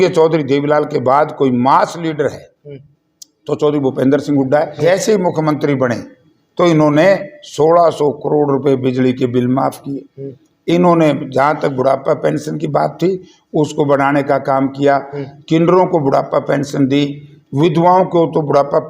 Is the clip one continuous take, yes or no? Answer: no